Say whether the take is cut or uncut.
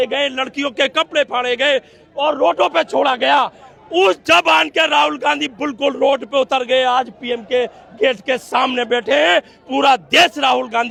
uncut